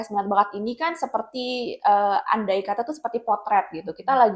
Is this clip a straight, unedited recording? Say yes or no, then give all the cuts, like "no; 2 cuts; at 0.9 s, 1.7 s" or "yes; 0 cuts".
yes; 0 cuts